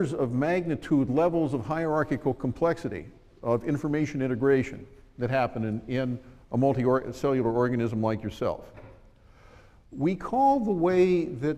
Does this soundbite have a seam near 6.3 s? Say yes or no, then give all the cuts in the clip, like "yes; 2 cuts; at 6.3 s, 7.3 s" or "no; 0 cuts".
no; 1 cut; at 9.0 s